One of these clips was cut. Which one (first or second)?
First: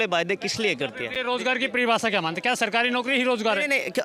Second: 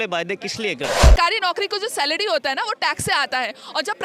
second